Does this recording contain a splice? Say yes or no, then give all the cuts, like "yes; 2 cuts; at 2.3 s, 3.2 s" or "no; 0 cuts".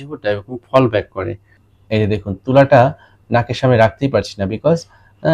yes; 1 cut; at 1.7 s